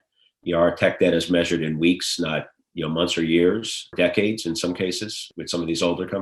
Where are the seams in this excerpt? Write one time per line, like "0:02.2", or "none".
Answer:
0:03.9
0:05.3